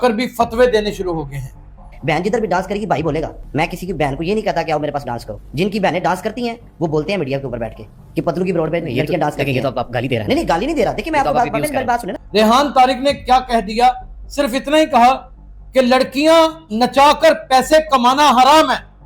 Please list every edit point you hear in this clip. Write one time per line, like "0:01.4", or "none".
0:01.9